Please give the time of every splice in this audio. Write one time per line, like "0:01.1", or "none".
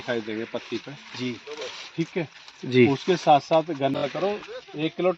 0:04.0